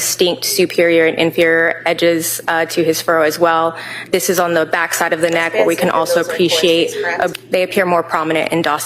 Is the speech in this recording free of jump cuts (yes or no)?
no